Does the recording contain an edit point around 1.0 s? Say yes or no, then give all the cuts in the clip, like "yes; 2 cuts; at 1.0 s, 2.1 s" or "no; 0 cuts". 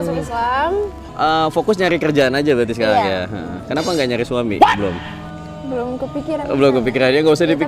yes; 1 cut; at 1.0 s